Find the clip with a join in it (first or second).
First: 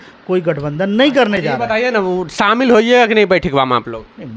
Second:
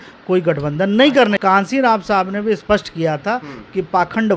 second